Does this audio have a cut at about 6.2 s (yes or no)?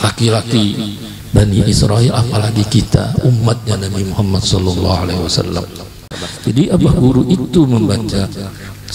yes